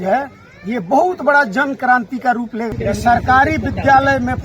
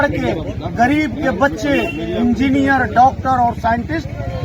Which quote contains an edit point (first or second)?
first